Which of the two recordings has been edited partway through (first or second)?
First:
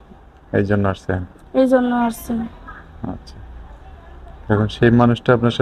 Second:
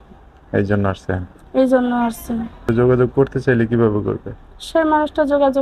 second